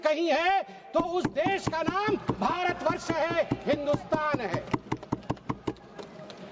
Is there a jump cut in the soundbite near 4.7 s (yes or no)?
no